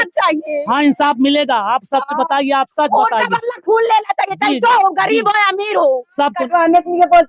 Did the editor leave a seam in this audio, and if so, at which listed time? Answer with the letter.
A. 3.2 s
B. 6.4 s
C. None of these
B